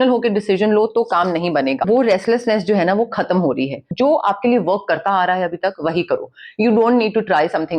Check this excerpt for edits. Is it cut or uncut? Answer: cut